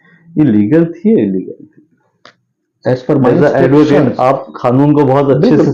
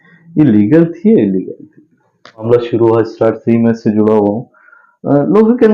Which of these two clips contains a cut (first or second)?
second